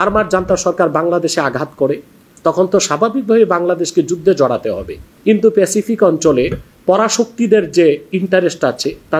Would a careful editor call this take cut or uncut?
cut